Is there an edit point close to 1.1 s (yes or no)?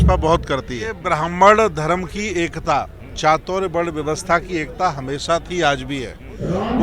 yes